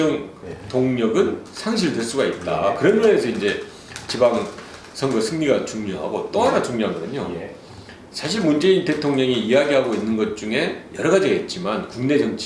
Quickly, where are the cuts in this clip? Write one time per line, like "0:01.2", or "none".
0:09.8